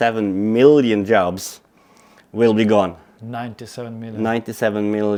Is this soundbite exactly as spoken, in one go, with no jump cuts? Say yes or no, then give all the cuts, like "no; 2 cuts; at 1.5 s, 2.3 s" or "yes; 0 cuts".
yes; 0 cuts